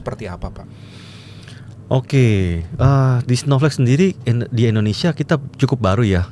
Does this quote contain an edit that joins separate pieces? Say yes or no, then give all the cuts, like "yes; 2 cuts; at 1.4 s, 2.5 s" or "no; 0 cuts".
no; 0 cuts